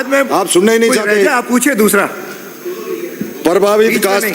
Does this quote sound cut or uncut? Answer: uncut